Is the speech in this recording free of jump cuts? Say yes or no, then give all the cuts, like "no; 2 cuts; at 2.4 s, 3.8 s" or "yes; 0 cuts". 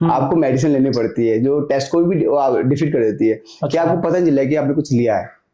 yes; 0 cuts